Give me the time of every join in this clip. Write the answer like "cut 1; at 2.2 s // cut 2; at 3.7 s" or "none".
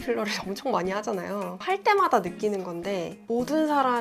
cut 1; at 1.6 s